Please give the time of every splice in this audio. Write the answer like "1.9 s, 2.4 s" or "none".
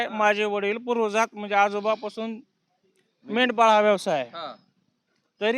none